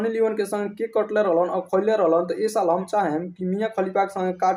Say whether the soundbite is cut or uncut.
uncut